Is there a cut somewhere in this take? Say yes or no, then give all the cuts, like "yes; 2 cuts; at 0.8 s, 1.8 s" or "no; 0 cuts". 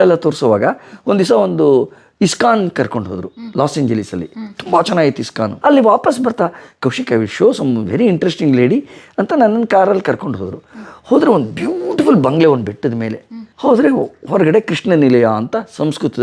no; 0 cuts